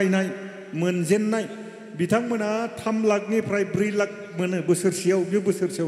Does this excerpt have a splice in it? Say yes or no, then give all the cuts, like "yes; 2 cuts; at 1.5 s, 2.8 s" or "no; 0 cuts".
no; 0 cuts